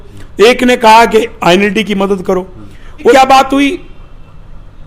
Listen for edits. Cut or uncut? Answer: cut